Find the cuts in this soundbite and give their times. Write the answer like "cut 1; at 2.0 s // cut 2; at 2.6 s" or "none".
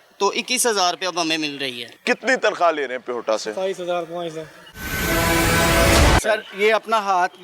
cut 1; at 6.2 s